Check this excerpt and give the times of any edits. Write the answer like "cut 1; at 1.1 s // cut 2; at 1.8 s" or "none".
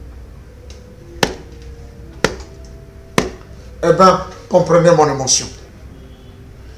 cut 1; at 5.7 s